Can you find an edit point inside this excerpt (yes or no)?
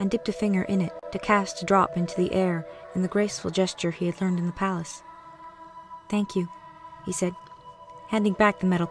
no